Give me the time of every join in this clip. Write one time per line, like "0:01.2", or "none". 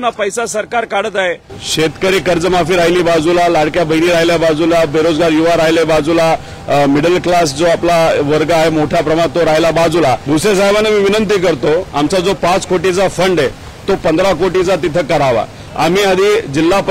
0:01.5
0:10.4
0:15.6